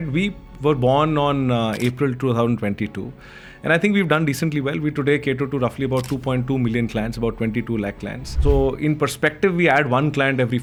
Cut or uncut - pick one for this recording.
uncut